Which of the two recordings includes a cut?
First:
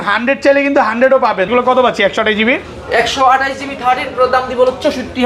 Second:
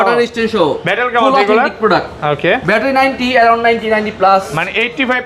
first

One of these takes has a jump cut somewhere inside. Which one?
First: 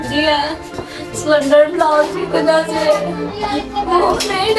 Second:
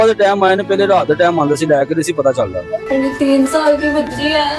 second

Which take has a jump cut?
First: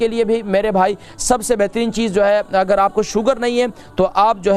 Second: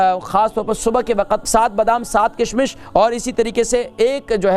second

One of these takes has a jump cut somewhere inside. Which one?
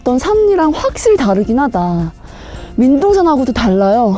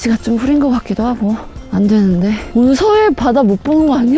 second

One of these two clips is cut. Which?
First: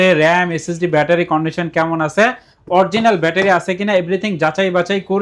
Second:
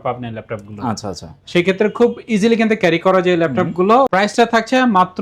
second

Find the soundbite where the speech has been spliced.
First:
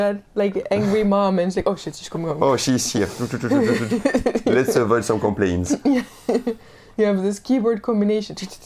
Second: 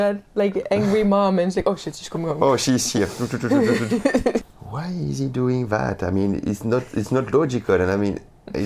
second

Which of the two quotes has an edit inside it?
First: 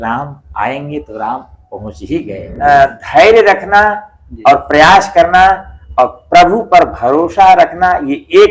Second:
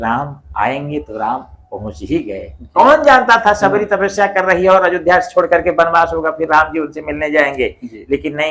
first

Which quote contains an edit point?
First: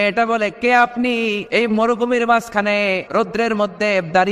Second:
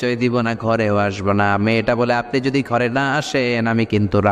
first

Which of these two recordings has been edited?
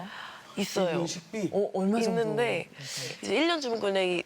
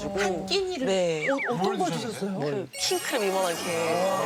first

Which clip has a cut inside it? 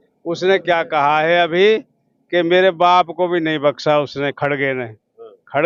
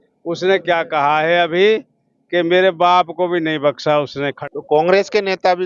second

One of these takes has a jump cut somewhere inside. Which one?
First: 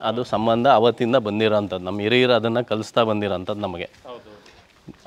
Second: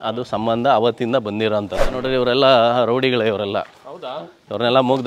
second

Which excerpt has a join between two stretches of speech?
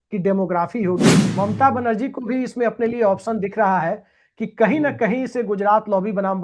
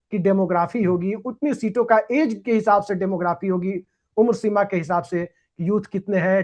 first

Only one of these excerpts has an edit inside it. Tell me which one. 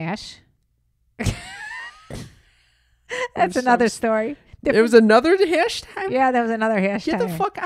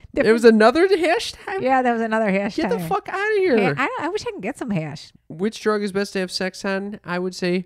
second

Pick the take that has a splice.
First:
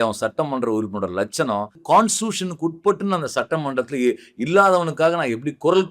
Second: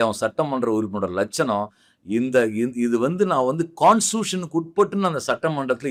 first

